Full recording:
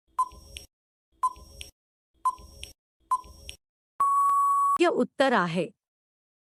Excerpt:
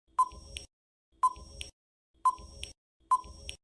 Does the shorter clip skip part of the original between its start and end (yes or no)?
no